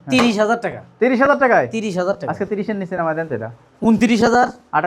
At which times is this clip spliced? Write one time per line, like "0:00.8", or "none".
none